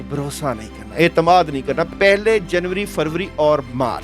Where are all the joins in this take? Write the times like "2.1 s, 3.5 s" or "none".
1.9 s